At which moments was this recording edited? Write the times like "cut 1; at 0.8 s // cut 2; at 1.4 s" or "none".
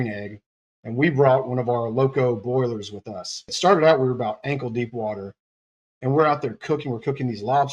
cut 1; at 3.5 s